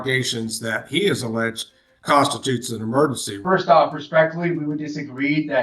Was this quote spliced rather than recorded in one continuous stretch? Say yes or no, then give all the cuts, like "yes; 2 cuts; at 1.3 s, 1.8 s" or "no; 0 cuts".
yes; 1 cut; at 3.3 s